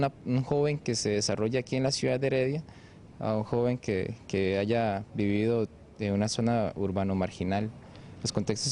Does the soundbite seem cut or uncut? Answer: uncut